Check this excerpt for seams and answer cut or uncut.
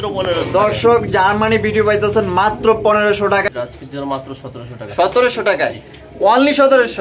cut